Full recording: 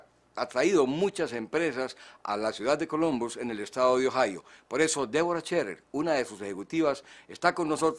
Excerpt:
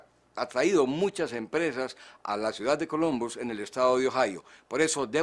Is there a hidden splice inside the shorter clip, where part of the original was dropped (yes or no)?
no